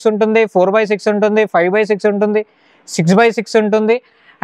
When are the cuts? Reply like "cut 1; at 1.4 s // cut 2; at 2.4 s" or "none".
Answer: none